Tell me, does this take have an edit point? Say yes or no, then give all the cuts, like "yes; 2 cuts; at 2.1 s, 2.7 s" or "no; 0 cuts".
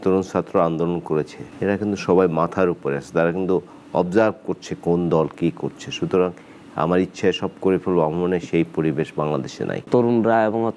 yes; 2 cuts; at 1.4 s, 9.8 s